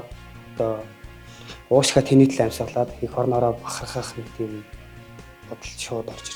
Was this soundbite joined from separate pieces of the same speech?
no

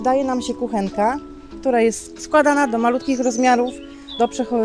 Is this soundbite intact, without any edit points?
yes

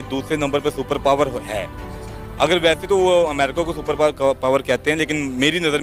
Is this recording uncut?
yes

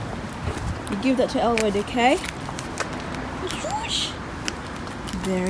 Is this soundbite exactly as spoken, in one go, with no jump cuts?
yes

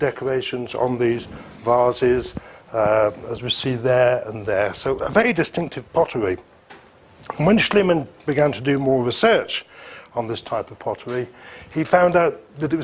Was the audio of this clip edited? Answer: yes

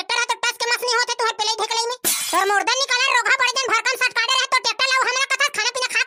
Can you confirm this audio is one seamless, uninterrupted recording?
yes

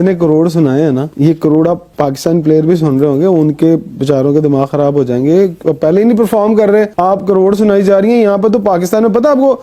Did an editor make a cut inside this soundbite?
no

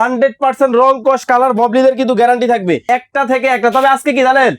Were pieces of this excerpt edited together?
yes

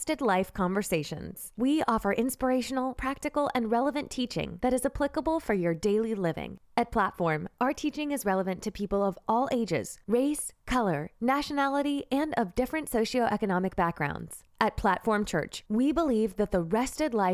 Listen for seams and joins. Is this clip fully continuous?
no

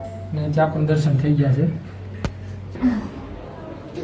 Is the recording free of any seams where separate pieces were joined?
yes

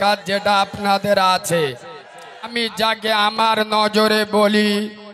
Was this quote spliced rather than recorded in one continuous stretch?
yes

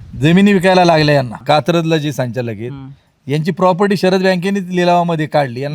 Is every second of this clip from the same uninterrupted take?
no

